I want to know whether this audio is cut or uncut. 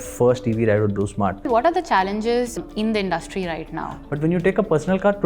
cut